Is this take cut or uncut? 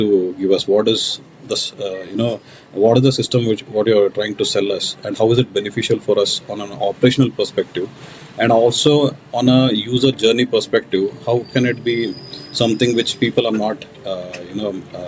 uncut